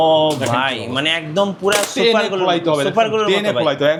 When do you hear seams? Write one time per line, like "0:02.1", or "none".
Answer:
none